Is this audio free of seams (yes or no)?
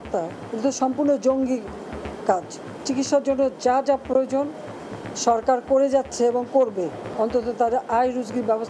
no